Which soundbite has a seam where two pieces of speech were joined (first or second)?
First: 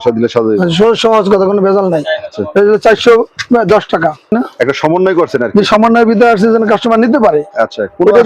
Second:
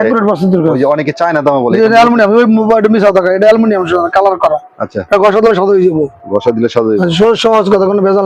first